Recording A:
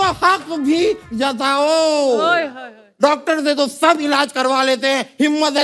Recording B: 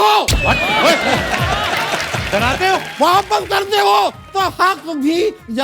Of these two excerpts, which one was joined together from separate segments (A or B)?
B